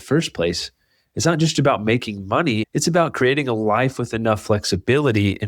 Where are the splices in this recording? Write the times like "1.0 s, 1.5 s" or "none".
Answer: 2.6 s